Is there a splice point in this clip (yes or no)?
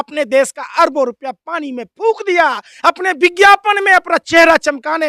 no